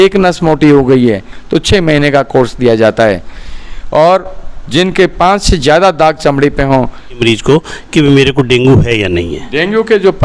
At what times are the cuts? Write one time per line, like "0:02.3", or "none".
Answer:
0:07.2